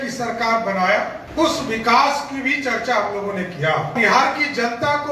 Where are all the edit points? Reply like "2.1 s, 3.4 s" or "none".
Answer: 1.2 s, 4.0 s